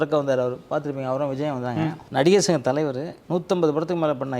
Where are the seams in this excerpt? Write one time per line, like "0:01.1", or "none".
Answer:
0:02.0
0:03.1

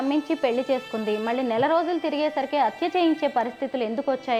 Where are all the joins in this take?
none

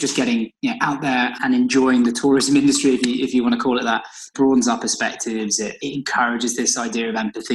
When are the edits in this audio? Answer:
0:01.4

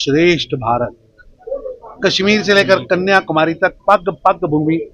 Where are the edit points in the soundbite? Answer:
none

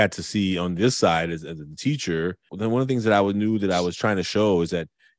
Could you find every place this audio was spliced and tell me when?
0:02.5

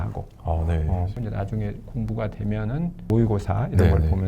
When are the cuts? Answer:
0:01.1
0:03.1

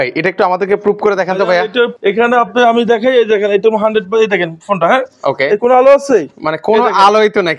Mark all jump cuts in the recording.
0:01.9

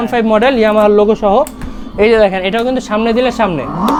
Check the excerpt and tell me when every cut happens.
none

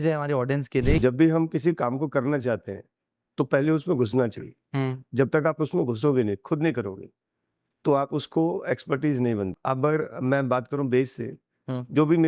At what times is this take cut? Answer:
0:01.0
0:09.6

